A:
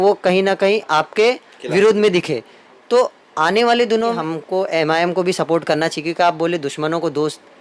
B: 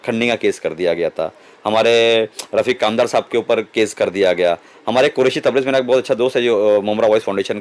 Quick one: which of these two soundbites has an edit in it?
A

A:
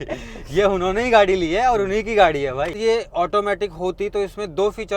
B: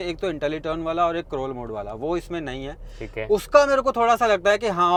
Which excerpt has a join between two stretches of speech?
A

